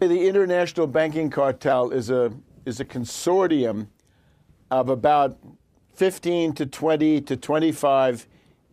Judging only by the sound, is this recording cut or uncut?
cut